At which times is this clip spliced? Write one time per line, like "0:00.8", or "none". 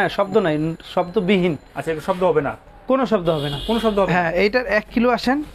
none